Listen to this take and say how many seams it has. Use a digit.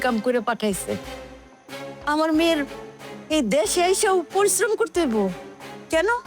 0